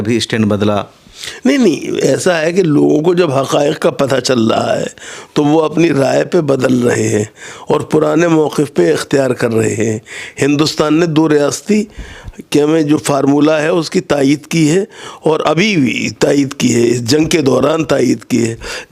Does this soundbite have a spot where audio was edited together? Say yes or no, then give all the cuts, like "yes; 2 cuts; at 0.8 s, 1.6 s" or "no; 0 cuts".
no; 0 cuts